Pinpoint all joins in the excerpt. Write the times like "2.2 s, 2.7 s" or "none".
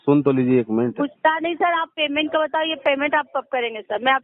none

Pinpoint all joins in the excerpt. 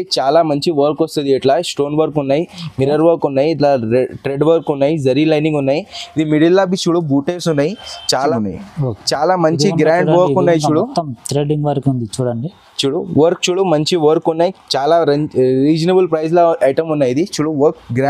8.3 s

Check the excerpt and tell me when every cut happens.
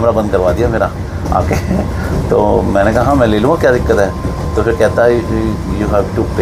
none

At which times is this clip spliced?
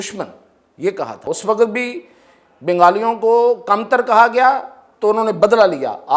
1.3 s

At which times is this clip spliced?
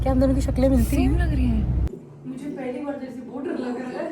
1.9 s

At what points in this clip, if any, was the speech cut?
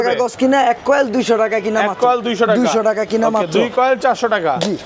none

